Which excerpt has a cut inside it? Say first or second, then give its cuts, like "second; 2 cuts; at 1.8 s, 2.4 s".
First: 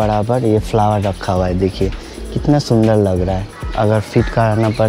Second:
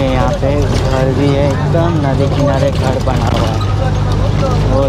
first; 1 cut; at 3.6 s